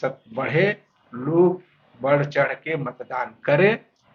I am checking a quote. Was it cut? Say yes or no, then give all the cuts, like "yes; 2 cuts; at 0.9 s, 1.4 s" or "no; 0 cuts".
no; 0 cuts